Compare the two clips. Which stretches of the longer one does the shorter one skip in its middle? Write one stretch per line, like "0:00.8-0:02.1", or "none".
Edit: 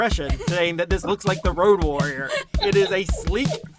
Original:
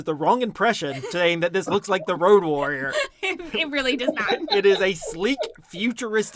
0:03.2-0:04.4